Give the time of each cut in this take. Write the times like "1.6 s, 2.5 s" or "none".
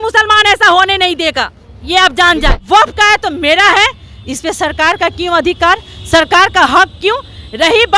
2.6 s